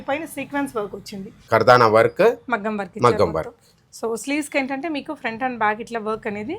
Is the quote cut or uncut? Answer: cut